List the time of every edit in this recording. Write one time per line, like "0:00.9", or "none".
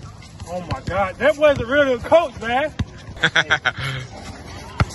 0:03.2